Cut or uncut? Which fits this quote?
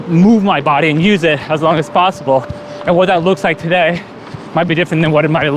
uncut